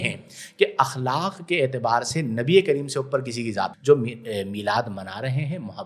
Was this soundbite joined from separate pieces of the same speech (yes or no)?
yes